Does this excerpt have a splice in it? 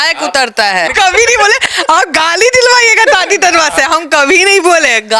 yes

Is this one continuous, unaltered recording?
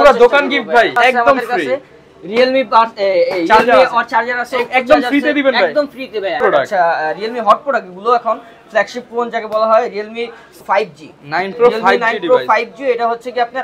no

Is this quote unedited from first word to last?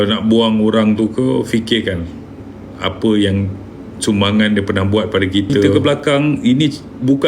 no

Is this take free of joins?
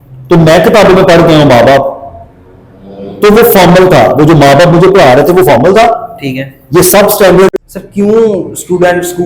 no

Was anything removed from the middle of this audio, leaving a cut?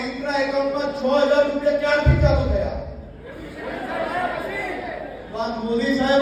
no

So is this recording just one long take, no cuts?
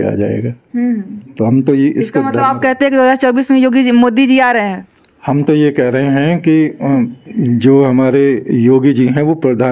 yes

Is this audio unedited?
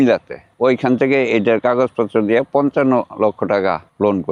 yes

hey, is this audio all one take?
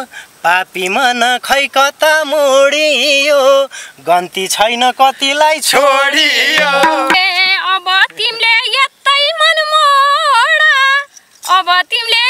no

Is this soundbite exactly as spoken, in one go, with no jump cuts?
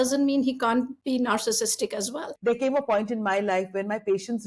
no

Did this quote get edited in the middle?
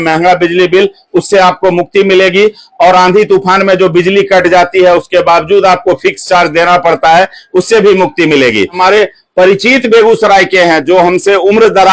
yes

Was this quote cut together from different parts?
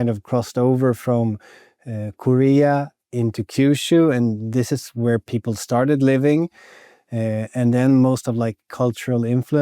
no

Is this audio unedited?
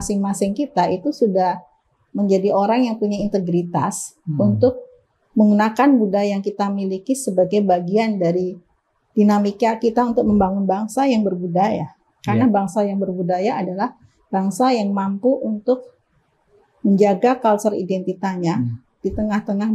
yes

